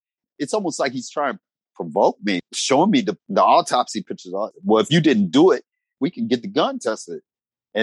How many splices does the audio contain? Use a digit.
5